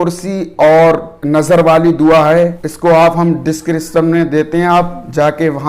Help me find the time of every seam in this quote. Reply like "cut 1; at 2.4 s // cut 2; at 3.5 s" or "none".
cut 1; at 1.1 s // cut 2; at 2.7 s